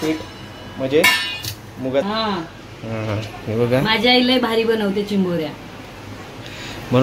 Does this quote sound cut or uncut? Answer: cut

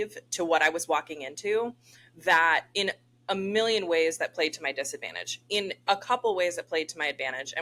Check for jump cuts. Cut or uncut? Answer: uncut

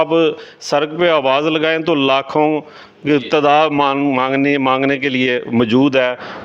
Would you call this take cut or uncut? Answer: uncut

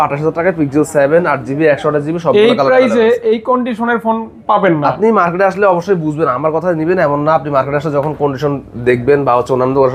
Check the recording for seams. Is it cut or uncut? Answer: uncut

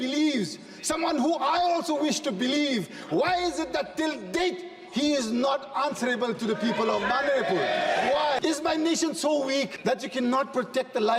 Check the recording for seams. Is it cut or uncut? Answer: cut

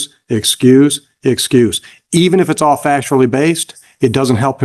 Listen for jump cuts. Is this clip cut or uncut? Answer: uncut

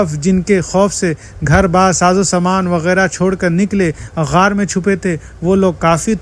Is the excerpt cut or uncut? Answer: uncut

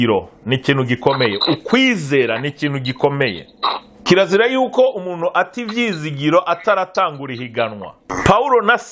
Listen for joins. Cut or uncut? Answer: cut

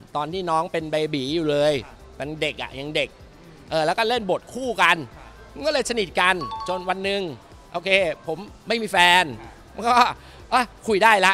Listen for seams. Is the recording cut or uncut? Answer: cut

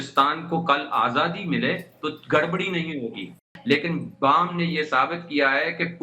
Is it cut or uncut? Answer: cut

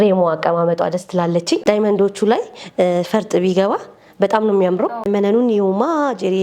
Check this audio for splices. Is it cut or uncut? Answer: cut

